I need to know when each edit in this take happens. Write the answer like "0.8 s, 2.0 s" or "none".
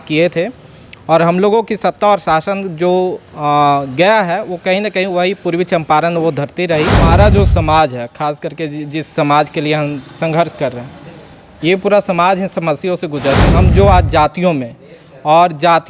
7.1 s, 13.5 s